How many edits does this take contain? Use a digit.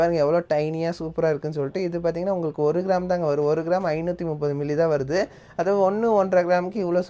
0